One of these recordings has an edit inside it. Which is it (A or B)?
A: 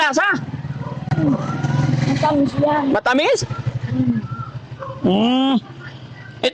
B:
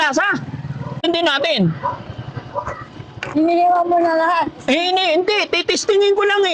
B